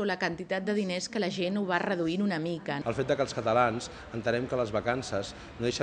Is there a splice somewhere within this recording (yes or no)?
yes